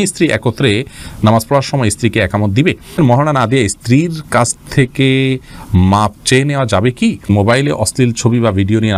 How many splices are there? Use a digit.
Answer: 2